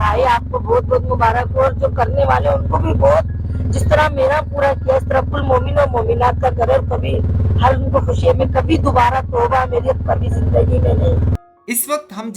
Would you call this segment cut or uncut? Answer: cut